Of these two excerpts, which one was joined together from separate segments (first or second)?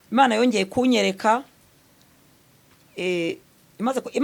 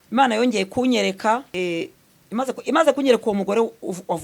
second